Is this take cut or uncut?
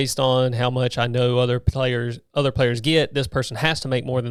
uncut